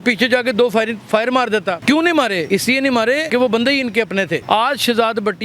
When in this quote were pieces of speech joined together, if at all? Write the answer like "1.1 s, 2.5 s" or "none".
1.8 s, 2.7 s, 4.4 s